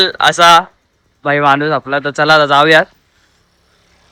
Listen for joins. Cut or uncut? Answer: uncut